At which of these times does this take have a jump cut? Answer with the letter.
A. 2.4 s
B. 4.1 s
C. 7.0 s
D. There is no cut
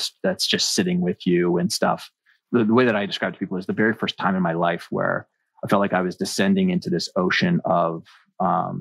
A